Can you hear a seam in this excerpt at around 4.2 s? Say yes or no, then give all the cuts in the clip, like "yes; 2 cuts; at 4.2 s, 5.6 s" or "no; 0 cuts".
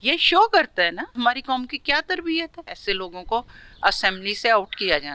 no; 2 cuts; at 1.1 s, 2.8 s